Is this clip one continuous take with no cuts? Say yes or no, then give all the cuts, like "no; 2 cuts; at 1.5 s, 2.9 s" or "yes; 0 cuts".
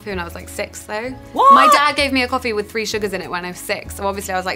no; 1 cut; at 1.2 s